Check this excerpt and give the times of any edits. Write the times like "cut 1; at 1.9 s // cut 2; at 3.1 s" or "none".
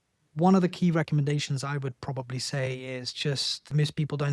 none